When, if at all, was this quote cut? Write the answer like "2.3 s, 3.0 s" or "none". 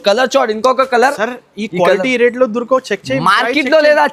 none